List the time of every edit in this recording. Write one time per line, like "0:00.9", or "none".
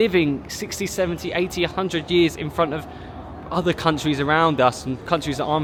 none